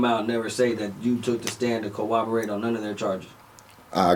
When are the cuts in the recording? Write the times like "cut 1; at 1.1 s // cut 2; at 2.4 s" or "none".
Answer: none